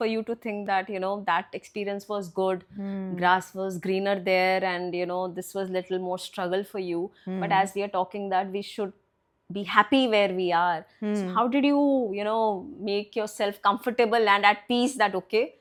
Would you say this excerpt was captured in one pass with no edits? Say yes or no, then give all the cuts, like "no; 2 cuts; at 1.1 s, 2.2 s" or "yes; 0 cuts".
yes; 0 cuts